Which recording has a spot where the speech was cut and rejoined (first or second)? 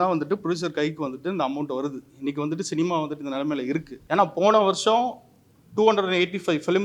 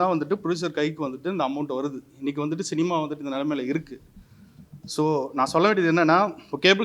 first